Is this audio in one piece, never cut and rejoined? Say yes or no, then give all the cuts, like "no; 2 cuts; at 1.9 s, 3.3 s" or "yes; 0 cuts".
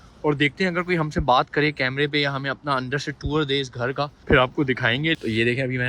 no; 2 cuts; at 4.2 s, 5.1 s